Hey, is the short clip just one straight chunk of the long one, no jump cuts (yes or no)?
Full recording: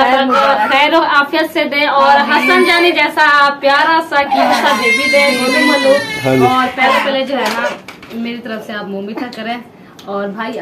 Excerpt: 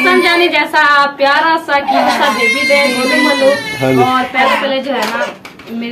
yes